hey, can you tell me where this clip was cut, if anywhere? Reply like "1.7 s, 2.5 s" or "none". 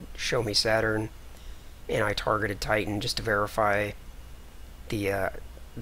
none